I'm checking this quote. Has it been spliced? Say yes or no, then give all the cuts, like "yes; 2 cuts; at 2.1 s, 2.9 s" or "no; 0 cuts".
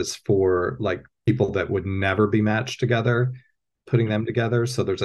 yes; 1 cut; at 1.1 s